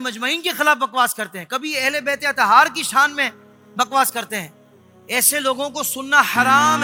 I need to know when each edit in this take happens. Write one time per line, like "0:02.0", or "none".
none